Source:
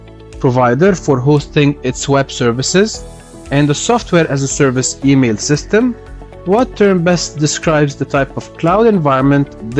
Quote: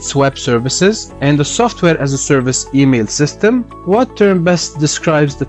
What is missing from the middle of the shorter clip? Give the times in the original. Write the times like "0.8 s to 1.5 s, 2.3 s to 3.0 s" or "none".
3.0 s to 3.4 s, 6.0 s to 6.3 s

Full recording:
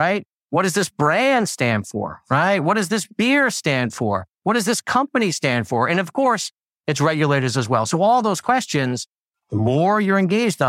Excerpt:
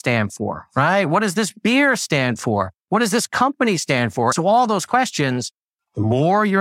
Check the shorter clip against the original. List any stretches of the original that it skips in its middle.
5.9 s to 7.9 s

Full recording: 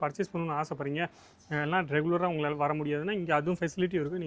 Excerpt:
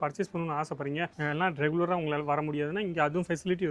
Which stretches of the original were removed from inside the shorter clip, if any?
1.1 s to 1.5 s

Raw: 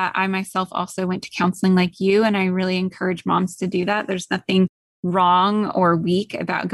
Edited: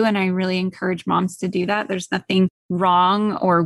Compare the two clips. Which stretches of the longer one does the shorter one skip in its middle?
4.8 s to 5.0 s

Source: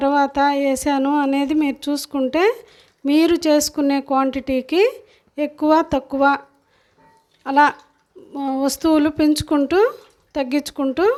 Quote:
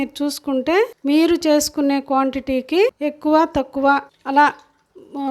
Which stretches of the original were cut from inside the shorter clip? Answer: 2.6 s to 3.0 s, 5.0 s to 5.3 s, 6.5 s to 7.3 s

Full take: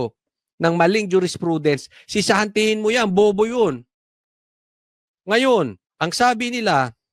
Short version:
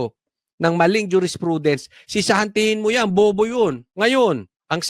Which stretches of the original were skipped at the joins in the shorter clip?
3.9 s to 5.2 s

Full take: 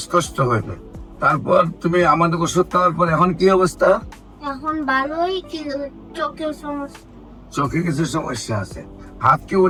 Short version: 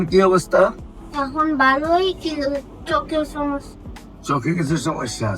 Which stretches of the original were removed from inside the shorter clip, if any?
none

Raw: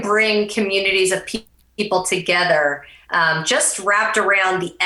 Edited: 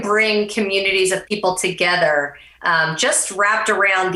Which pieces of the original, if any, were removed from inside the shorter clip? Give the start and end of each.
1.2 s to 1.7 s

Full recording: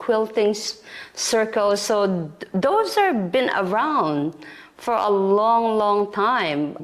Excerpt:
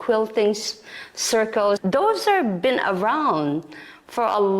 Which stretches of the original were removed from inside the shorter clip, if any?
1.8 s to 2.5 s

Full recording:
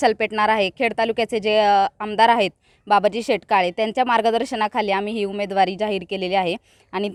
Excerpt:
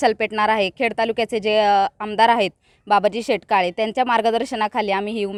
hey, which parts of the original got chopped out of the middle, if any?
none

